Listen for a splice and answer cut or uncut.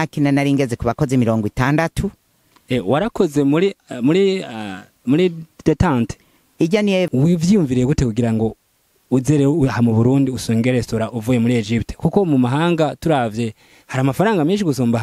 cut